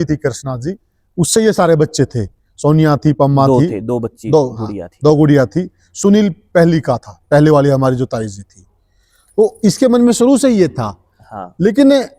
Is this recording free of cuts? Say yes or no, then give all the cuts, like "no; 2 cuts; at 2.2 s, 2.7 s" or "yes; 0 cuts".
yes; 0 cuts